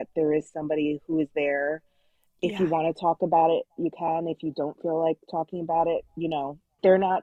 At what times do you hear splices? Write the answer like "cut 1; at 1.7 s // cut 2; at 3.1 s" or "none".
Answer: none